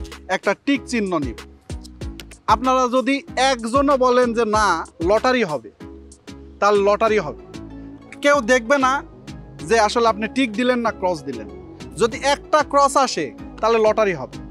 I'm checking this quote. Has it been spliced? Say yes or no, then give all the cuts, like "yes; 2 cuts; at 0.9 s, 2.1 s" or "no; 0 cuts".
no; 0 cuts